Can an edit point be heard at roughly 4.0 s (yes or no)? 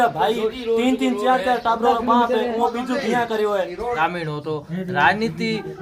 yes